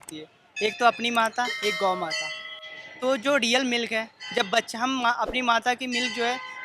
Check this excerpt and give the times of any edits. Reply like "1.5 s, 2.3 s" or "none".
none